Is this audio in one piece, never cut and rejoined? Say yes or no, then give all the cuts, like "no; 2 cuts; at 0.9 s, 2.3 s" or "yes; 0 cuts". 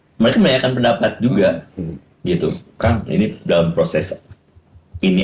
yes; 0 cuts